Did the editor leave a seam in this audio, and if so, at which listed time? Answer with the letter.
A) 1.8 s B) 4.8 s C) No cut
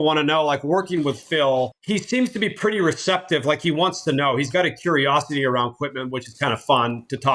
A